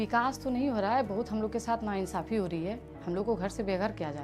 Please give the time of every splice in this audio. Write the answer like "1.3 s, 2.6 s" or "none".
2.9 s